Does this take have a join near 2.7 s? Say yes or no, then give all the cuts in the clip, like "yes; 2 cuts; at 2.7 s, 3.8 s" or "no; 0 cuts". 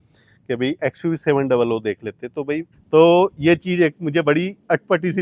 yes; 1 cut; at 2.7 s